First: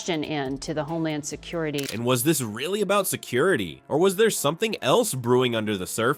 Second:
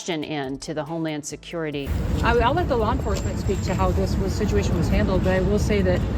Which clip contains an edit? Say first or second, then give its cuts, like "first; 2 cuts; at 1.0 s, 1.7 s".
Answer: second; 1 cut; at 1.9 s